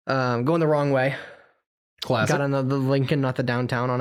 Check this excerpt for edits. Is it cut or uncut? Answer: uncut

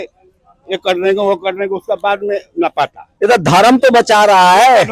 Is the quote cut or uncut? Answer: cut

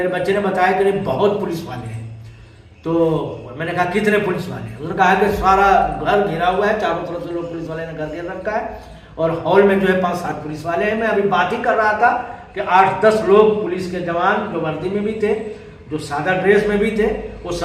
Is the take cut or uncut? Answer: uncut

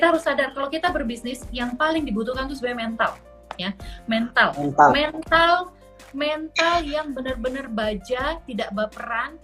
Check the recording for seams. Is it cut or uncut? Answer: uncut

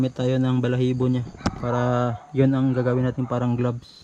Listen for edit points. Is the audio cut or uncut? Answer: uncut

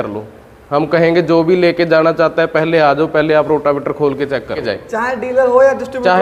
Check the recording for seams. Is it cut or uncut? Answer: uncut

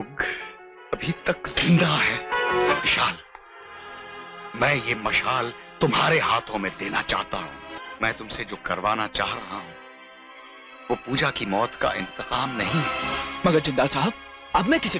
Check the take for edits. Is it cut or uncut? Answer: cut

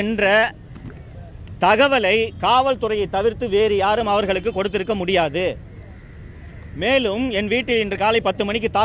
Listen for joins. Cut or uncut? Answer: uncut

